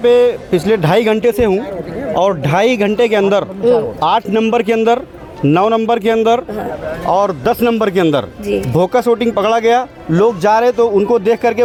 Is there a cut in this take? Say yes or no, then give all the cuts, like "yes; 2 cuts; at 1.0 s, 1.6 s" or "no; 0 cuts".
no; 0 cuts